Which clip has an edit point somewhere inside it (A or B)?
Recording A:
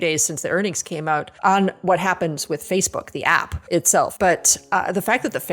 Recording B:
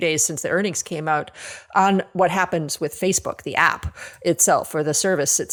A